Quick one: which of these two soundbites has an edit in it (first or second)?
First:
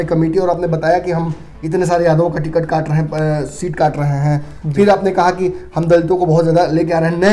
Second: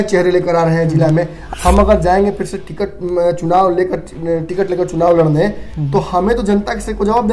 second